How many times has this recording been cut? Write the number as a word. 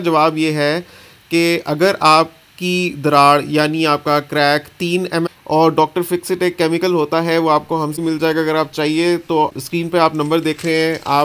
one